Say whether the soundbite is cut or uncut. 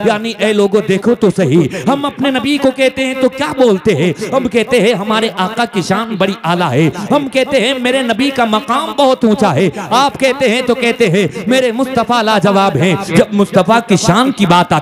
cut